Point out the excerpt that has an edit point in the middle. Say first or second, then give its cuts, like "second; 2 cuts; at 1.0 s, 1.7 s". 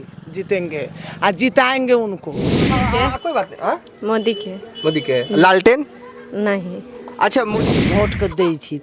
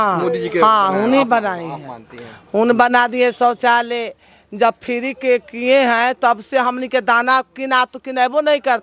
first; 2 cuts; at 2.8 s, 7.5 s